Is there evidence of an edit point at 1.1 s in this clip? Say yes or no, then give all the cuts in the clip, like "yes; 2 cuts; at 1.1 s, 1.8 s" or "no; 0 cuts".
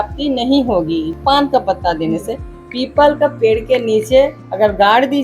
yes; 1 cut; at 1.1 s